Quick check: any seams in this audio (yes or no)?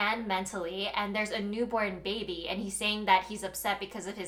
no